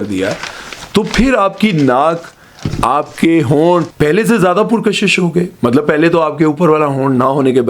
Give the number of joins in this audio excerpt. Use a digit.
1